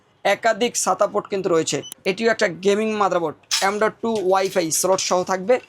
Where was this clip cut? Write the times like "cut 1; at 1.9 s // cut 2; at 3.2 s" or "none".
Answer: cut 1; at 1.9 s